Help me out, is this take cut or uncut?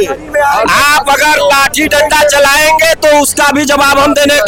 uncut